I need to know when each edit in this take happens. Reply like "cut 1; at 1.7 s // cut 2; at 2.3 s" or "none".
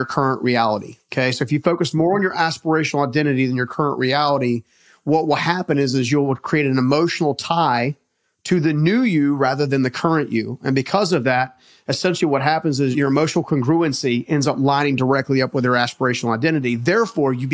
cut 1; at 1.0 s // cut 2; at 12.9 s